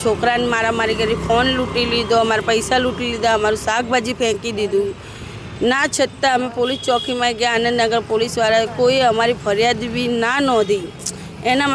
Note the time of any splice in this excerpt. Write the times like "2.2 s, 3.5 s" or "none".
none

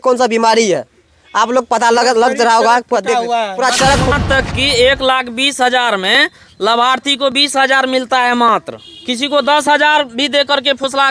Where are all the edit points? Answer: 4.2 s

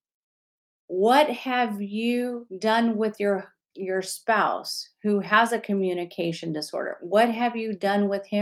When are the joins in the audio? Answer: 2.5 s

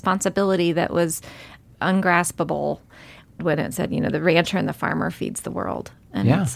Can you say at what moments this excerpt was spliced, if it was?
1.6 s, 3.4 s

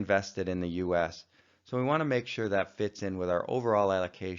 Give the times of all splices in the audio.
2.1 s

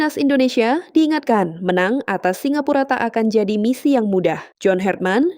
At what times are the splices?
4.5 s

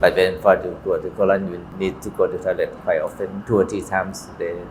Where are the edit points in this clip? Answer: 1.6 s, 3.4 s

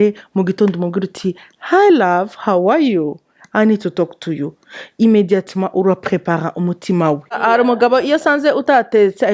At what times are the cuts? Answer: 7.4 s

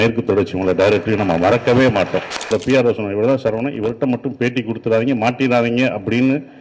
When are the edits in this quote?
2.5 s

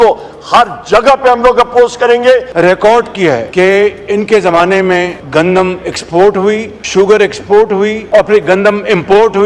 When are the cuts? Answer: 2.5 s, 3.5 s, 5.2 s, 6.7 s, 8.0 s

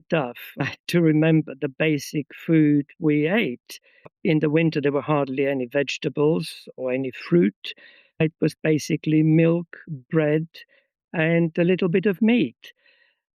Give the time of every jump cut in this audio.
4.1 s

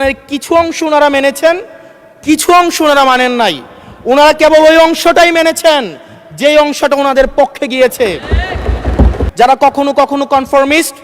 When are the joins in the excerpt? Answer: 9.2 s

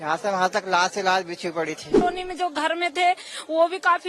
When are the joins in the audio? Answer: 2.0 s

